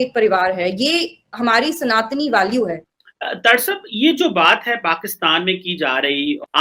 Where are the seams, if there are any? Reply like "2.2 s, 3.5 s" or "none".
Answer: none